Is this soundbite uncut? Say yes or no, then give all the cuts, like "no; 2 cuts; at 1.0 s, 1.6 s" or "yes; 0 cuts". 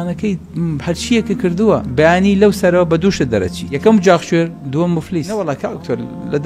no; 3 cuts; at 1.9 s, 3.7 s, 5.3 s